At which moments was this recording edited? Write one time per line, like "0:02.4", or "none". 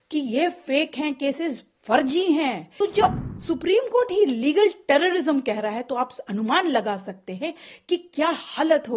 0:02.7